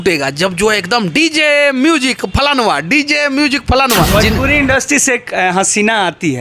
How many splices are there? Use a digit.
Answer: 1